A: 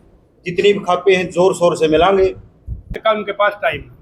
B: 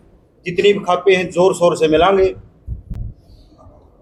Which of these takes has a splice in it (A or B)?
A